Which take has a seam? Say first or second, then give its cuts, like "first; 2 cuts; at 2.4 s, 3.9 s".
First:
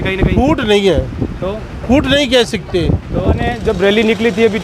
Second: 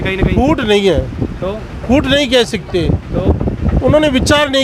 first; 1 cut; at 3.5 s